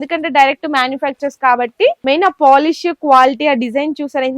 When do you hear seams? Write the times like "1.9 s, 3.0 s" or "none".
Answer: 2.0 s